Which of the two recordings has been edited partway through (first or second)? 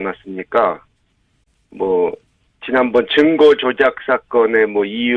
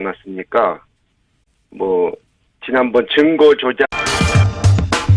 first